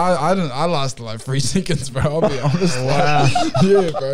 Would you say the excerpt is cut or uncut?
uncut